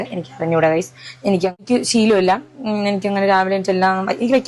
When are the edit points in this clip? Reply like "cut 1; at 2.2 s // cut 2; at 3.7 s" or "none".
cut 1; at 1.6 s